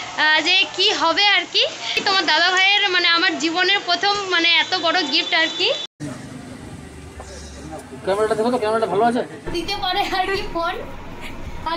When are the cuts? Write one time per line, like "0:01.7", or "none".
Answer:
0:01.9
0:06.0
0:09.5